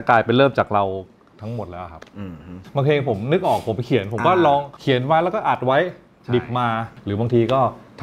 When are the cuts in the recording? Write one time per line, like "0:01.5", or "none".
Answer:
0:02.6
0:04.7
0:06.9

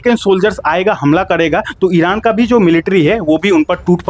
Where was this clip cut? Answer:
none

